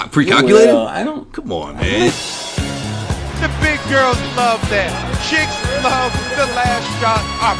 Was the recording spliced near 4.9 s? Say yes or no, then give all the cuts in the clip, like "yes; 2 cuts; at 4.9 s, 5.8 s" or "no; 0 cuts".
no; 1 cut; at 2.2 s